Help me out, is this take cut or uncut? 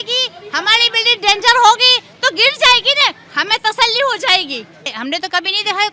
cut